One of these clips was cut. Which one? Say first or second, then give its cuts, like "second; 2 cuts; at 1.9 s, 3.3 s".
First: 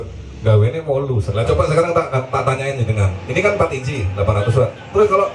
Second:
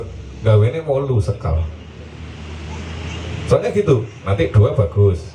first; 1 cut; at 1.4 s